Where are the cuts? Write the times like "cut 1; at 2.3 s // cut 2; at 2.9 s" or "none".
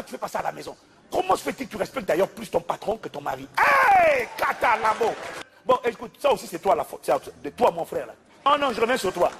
cut 1; at 5.4 s // cut 2; at 8.5 s